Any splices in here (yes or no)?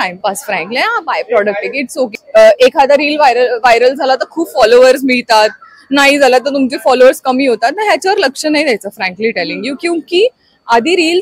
yes